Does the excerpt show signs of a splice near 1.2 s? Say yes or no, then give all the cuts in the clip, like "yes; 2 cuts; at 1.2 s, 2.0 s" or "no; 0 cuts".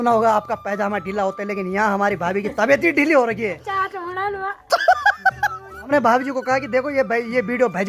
no; 2 cuts; at 3.7 s, 5.9 s